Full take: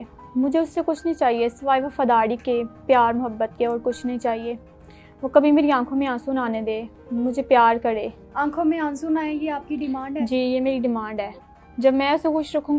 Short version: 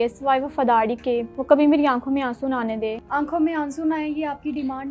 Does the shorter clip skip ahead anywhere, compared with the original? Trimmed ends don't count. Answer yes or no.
yes